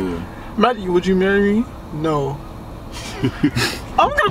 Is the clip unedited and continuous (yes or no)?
yes